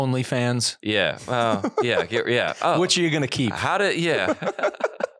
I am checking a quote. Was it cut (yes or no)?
no